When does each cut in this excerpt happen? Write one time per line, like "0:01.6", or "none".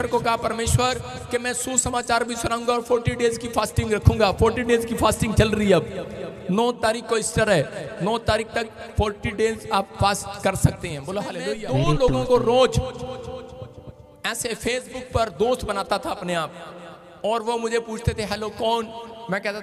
0:11.3